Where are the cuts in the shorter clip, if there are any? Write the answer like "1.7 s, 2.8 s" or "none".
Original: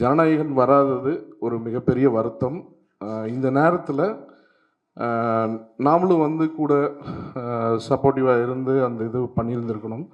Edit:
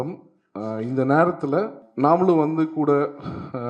1.8 s